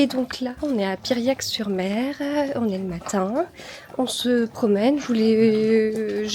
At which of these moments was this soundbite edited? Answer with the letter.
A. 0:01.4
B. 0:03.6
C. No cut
C